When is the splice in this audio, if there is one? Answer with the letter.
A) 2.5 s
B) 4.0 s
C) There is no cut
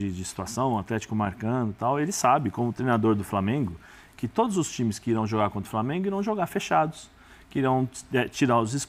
C